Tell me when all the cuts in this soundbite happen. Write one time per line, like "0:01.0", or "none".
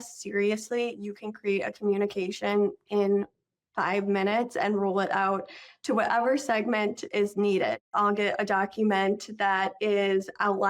0:07.0
0:07.9